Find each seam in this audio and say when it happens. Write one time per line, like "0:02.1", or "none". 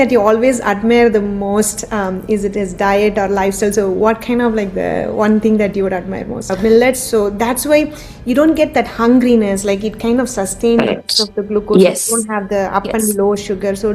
0:06.7